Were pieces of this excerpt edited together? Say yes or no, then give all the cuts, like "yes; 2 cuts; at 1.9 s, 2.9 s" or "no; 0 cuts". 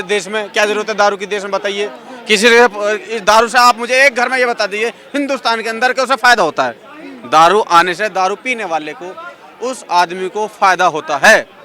no; 0 cuts